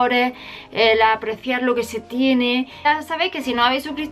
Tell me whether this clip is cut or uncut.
cut